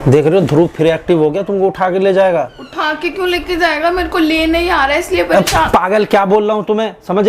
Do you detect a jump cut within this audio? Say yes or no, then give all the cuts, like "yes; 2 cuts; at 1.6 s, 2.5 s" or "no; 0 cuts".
no; 0 cuts